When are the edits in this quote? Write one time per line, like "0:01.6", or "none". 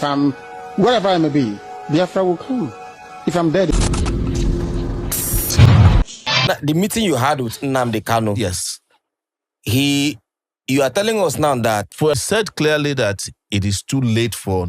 0:03.7
0:06.5
0:12.2